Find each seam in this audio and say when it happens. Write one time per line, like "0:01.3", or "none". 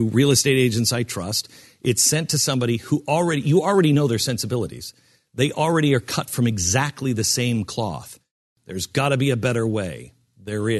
none